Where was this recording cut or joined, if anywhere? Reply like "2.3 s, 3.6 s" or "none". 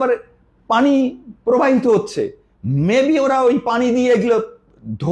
none